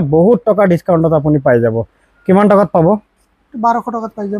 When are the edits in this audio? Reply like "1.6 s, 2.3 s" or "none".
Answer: none